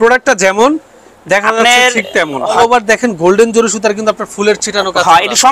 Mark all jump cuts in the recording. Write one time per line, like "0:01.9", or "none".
0:02.6